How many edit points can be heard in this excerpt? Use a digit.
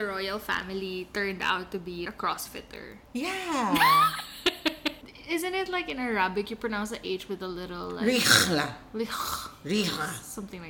2